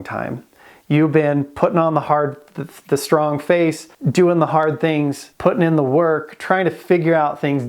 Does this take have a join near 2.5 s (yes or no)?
no